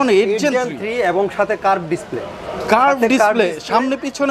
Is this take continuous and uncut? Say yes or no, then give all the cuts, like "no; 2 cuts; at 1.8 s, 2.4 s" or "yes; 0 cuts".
yes; 0 cuts